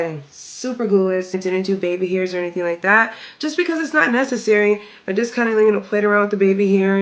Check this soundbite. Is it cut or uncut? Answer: cut